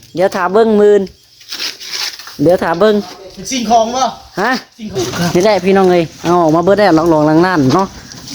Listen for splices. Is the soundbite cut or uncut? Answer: cut